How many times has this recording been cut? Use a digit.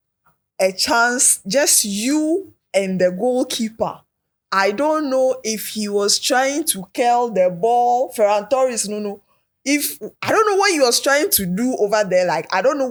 0